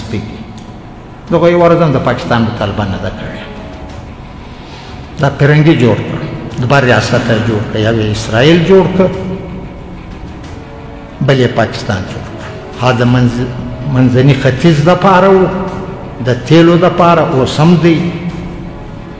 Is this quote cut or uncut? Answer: uncut